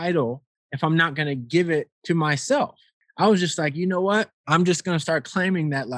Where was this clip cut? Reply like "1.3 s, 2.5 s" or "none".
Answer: 1.9 s, 3.0 s, 4.4 s